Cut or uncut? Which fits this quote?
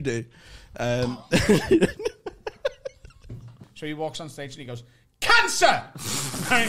cut